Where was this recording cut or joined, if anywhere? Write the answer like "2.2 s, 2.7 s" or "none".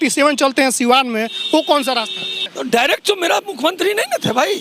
2.4 s